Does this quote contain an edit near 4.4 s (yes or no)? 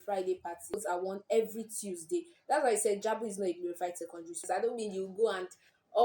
yes